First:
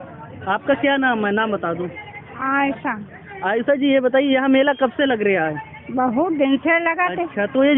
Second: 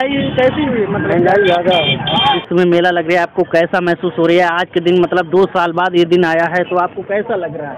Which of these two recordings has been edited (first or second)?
second